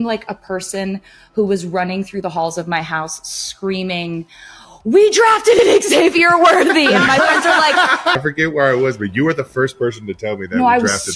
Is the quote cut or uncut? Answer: cut